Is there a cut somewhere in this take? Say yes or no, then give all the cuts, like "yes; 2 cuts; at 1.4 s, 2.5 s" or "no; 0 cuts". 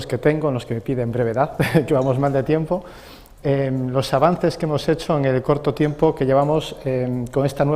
yes; 1 cut; at 6.8 s